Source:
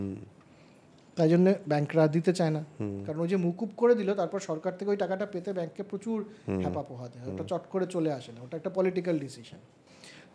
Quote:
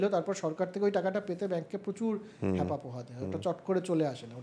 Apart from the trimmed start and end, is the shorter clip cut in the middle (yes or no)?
no